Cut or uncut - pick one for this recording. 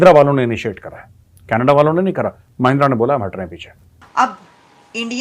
cut